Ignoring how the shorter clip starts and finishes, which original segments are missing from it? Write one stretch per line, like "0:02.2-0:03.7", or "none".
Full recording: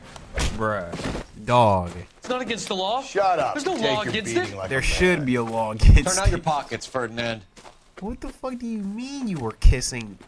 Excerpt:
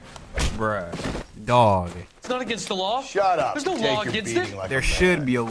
none